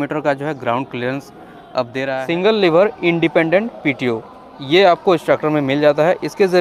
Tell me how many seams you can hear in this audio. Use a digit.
1